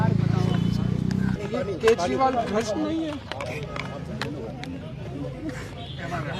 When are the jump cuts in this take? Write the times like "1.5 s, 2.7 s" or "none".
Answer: none